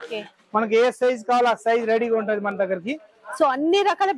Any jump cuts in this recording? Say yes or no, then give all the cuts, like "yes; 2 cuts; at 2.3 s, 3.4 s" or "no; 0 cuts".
no; 0 cuts